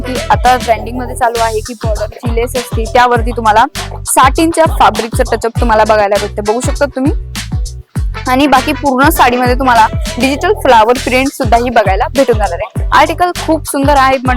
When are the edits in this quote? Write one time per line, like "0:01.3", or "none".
none